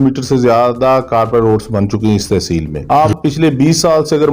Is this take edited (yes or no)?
yes